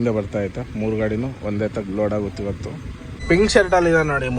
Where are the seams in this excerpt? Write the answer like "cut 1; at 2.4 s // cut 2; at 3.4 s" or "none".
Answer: cut 1; at 3.2 s